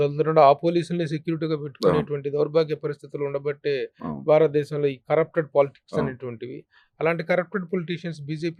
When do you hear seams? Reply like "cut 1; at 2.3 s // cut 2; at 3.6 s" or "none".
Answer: none